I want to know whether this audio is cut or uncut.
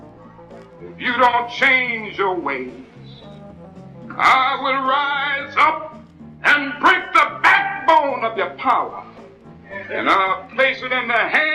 uncut